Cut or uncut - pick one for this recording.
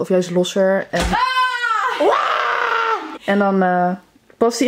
uncut